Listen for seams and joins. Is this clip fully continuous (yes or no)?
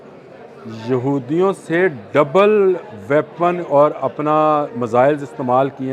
yes